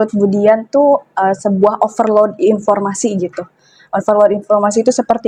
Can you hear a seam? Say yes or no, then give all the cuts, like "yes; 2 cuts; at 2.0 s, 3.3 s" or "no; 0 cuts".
no; 0 cuts